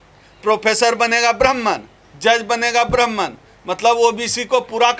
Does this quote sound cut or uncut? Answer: uncut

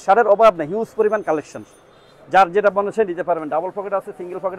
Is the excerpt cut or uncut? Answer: uncut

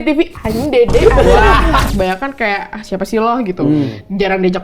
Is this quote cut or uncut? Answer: cut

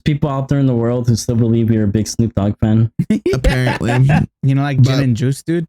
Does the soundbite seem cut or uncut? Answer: cut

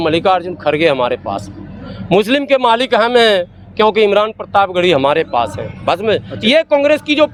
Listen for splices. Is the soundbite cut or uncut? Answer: uncut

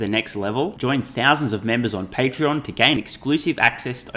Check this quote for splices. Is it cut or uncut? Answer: uncut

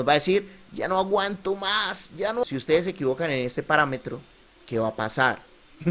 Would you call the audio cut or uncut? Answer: cut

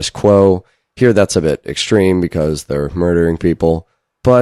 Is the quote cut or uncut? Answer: uncut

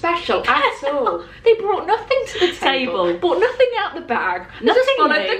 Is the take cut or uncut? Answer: uncut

